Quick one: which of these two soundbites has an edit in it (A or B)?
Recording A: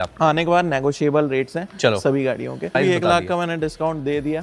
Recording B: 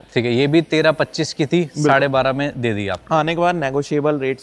A